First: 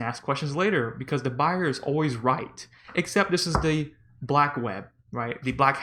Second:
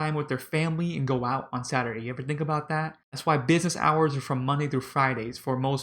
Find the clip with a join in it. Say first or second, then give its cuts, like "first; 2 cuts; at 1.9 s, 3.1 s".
second; 1 cut; at 3.0 s